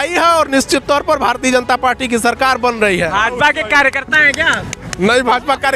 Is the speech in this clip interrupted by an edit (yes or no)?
no